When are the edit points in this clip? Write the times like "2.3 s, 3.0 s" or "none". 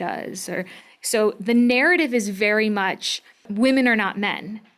3.5 s